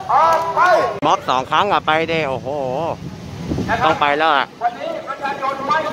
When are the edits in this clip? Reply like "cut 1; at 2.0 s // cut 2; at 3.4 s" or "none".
cut 1; at 1.0 s